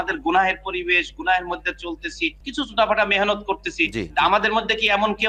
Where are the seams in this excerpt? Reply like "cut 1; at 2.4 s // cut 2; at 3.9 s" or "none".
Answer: none

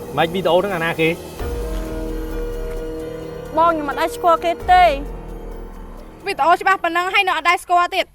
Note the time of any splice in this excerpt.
cut 1; at 1.2 s // cut 2; at 3.5 s

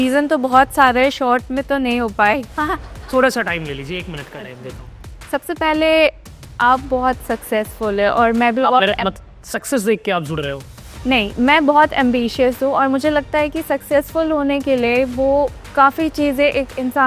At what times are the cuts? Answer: none

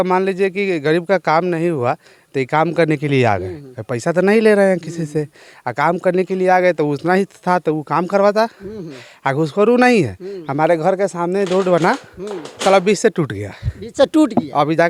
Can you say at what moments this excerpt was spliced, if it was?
none

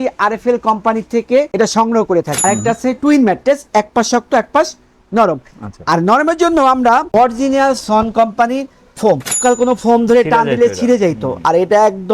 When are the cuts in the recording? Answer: cut 1; at 2.3 s // cut 2; at 7.1 s // cut 3; at 9.4 s

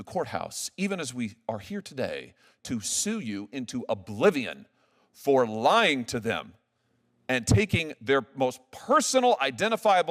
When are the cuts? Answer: none

